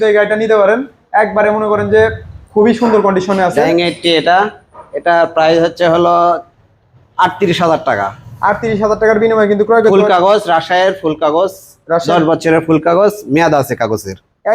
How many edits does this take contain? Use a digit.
1